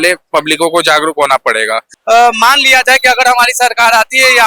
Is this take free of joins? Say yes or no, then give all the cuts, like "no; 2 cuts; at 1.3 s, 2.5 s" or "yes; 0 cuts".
no; 1 cut; at 1.9 s